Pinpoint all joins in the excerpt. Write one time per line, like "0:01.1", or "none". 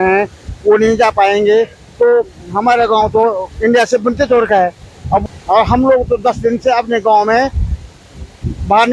0:05.2